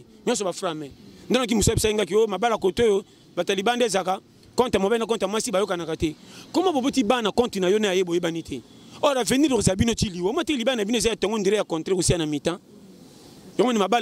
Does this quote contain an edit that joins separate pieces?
no; 0 cuts

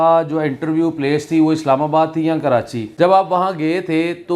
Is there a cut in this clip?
yes; 1 cut; at 2.8 s

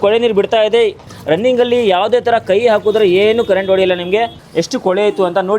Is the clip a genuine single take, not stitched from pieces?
no; 2 cuts; at 1.1 s, 4.4 s

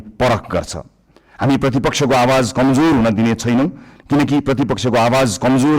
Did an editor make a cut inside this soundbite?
no; 0 cuts

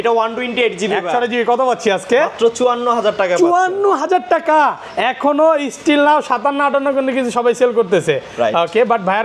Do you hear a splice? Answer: no; 0 cuts

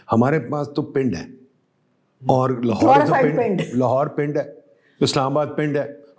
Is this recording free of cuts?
yes; 0 cuts

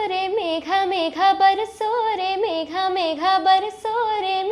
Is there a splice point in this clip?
no; 0 cuts

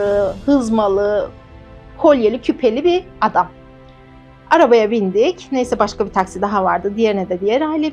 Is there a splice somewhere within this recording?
no; 0 cuts

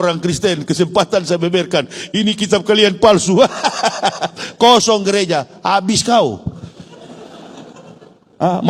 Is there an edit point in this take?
no; 0 cuts

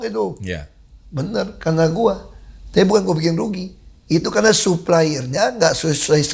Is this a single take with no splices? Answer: yes; 0 cuts

